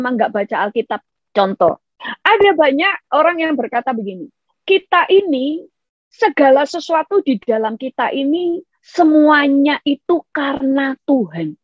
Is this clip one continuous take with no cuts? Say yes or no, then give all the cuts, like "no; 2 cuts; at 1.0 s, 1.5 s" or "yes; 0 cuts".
no; 1 cut; at 1.0 s